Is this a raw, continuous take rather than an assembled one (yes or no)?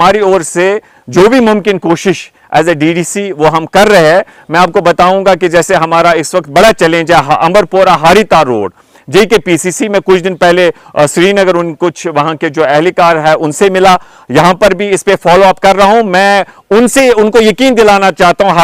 yes